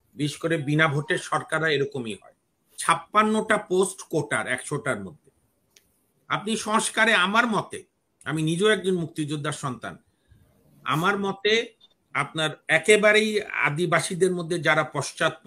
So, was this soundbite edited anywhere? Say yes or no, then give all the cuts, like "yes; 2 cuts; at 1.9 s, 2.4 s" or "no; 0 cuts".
yes; 1 cut; at 2.8 s